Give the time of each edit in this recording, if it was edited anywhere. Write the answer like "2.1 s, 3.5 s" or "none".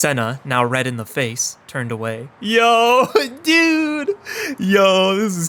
none